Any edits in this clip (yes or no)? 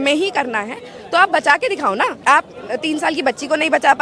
yes